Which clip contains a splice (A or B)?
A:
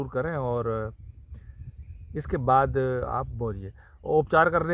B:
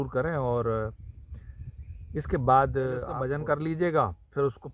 B